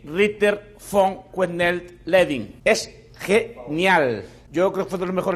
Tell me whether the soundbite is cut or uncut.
cut